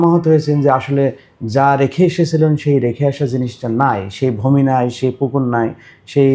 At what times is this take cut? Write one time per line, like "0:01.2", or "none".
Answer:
none